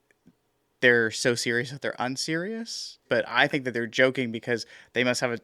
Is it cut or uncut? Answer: cut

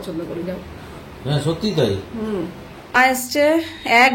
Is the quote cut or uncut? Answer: cut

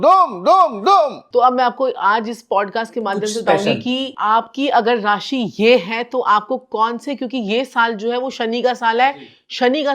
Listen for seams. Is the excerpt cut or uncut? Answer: cut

